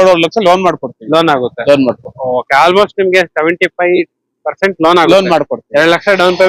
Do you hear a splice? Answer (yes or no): no